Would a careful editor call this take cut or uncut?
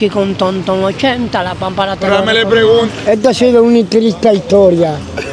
cut